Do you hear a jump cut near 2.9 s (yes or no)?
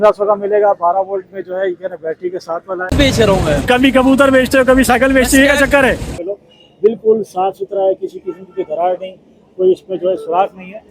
yes